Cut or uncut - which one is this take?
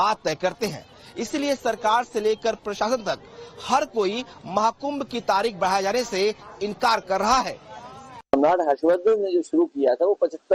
cut